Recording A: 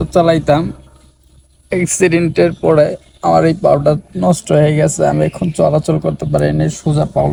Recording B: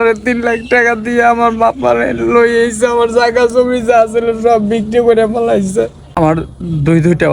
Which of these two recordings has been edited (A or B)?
B